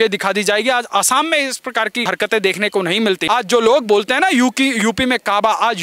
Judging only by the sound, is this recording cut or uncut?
cut